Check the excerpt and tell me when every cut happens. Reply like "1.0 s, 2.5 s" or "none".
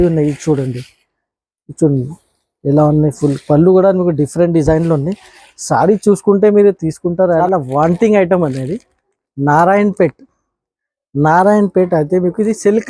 7.4 s